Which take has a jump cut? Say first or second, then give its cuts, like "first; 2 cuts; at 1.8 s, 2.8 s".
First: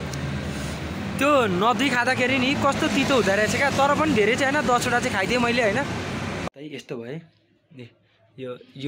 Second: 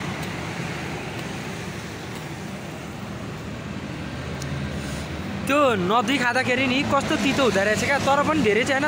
first; 1 cut; at 6.4 s